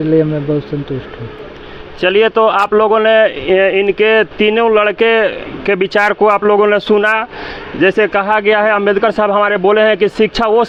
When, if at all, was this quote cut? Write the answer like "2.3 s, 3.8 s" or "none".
none